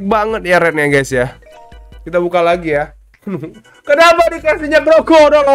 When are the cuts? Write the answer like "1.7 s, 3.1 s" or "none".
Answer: none

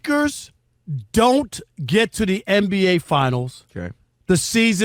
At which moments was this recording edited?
none

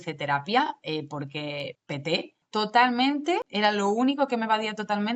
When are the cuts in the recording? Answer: 2.3 s, 3.5 s

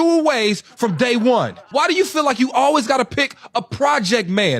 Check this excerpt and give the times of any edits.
none

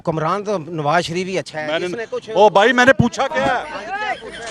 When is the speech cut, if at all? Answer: 3.6 s

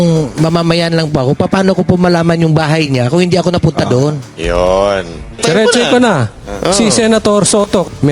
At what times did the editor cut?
5.4 s

